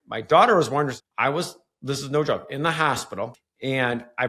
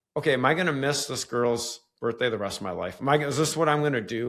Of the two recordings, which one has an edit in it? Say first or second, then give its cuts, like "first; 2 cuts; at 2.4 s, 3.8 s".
first; 2 cuts; at 0.9 s, 3.4 s